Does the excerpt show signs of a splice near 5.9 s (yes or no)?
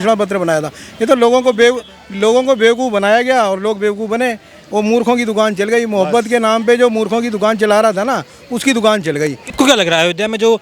no